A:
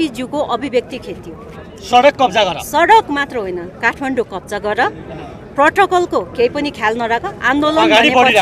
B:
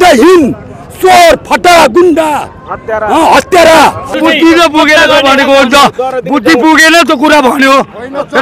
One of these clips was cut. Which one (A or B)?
B